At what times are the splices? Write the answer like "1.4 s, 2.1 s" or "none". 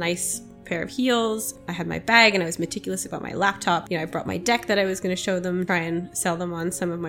1.5 s, 3.8 s, 5.7 s